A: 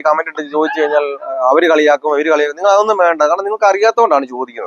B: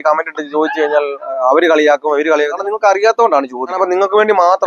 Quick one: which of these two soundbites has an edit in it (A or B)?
B